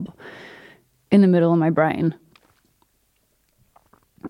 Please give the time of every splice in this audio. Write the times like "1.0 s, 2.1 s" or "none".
none